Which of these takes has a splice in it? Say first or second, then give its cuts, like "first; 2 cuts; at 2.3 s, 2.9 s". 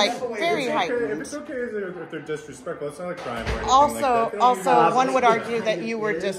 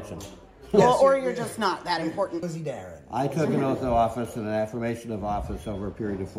second; 1 cut; at 2.5 s